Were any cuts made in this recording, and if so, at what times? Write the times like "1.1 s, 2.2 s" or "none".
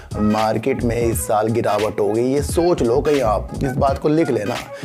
none